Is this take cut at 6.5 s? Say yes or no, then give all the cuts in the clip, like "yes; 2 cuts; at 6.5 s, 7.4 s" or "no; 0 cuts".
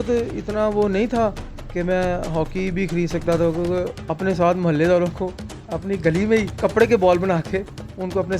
yes; 2 cuts; at 4.0 s, 6.5 s